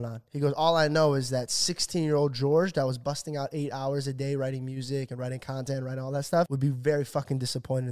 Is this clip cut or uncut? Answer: cut